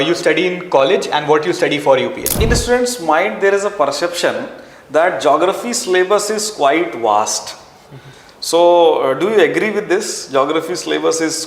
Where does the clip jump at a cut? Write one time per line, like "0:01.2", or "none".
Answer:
0:02.3